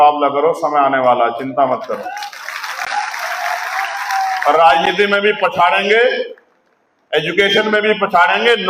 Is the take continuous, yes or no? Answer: yes